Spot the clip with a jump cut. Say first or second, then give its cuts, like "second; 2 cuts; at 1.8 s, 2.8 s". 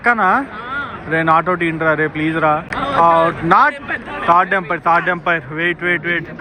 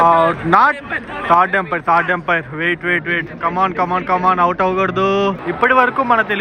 second; 1 cut; at 5.4 s